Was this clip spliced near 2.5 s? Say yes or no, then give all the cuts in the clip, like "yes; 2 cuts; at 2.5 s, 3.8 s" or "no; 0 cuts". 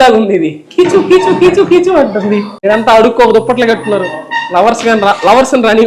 yes; 1 cut; at 2.5 s